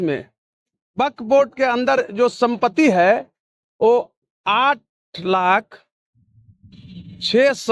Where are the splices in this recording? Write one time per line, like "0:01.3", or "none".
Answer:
none

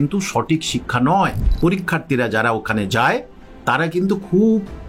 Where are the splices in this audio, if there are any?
0:01.4

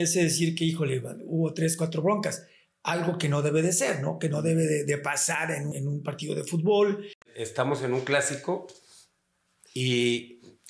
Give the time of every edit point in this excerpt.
0:05.7
0:07.4

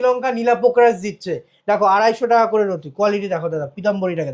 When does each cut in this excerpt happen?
none

